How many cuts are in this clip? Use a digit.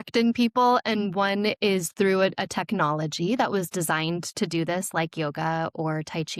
0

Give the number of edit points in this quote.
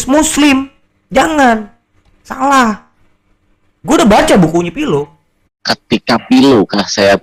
1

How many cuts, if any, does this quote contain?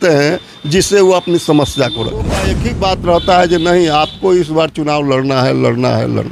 1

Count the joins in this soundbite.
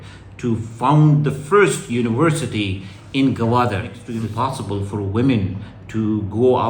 1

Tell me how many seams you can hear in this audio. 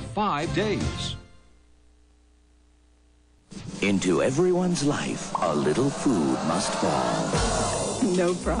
0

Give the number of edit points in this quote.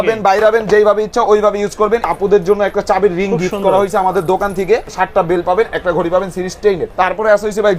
3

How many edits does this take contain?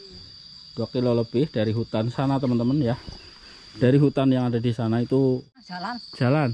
1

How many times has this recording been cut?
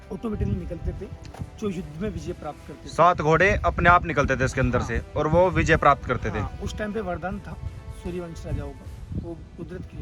0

